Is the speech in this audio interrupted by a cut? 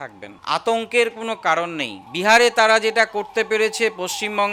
no; 0 cuts

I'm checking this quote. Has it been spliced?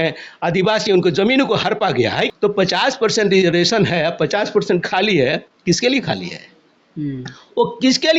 yes; 1 cut; at 2.3 s

